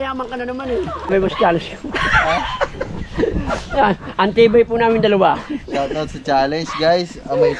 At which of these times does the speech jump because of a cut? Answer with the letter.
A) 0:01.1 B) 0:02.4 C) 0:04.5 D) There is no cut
A